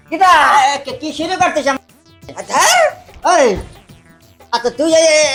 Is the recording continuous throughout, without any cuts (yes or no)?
yes